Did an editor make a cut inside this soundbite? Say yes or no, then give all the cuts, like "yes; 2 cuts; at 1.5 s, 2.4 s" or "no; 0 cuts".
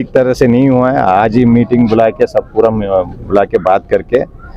no; 0 cuts